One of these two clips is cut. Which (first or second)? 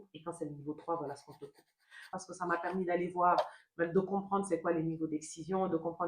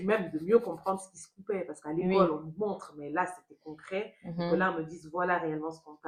first